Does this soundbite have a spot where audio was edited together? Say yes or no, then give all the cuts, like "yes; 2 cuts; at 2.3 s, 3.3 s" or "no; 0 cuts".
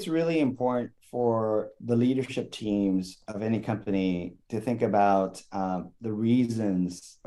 no; 0 cuts